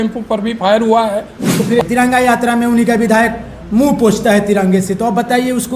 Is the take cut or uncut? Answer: cut